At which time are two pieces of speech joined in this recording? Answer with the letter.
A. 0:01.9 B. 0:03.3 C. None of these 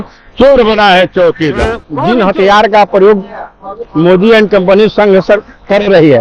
A